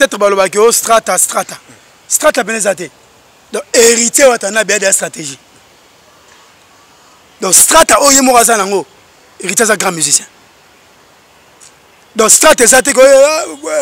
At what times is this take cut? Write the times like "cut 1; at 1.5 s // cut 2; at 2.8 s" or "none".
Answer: none